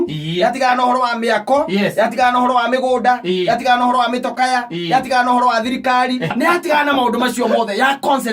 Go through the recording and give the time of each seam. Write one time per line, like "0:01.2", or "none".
0:06.3